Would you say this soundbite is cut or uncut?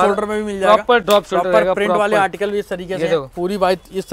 uncut